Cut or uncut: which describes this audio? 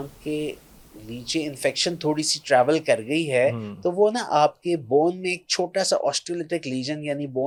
uncut